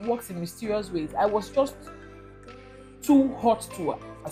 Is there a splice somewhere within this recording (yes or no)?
no